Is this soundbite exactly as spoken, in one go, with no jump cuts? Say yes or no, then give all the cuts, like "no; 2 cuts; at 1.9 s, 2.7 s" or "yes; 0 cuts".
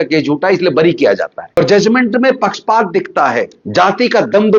no; 2 cuts; at 1.6 s, 3.6 s